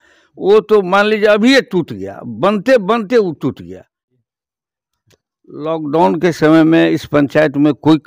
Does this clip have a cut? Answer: yes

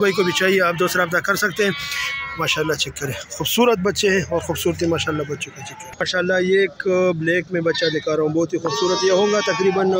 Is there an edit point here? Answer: yes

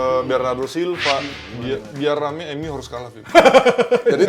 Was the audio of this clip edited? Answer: yes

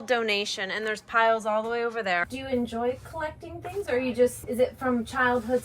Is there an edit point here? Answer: yes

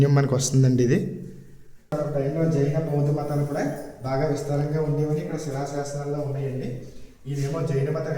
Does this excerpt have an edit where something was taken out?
yes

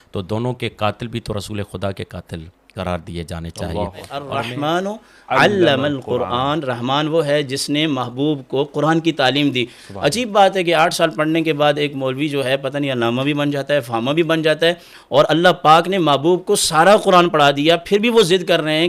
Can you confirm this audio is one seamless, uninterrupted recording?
no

